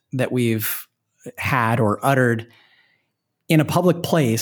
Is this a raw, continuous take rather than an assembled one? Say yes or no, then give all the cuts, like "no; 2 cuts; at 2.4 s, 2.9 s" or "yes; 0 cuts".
yes; 0 cuts